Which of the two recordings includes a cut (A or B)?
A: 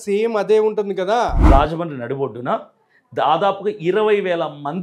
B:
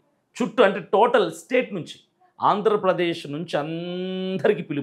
A